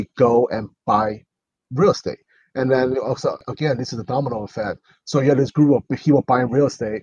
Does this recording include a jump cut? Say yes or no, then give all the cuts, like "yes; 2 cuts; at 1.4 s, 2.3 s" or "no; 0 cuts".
no; 0 cuts